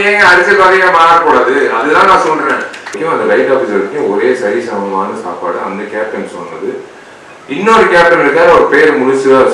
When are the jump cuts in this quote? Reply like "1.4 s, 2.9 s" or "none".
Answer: 3.0 s